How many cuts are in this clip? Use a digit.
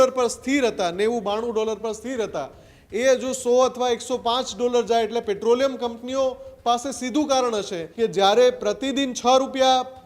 1